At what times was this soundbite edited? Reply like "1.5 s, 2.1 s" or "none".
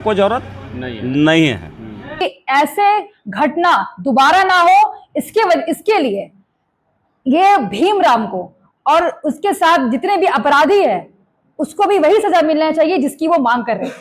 2.2 s